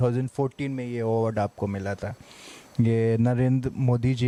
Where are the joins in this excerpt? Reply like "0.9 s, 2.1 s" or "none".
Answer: none